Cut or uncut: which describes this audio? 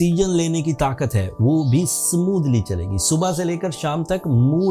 uncut